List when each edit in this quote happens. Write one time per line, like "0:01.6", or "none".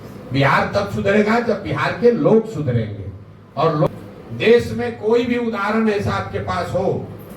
0:03.9

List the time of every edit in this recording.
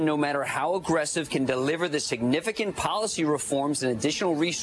none

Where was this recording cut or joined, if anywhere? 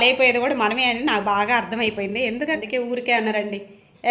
0:02.6

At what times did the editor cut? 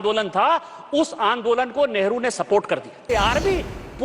0:03.1

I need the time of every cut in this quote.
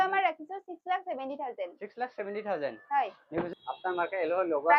0:03.6

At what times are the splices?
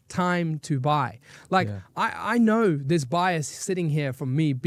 none

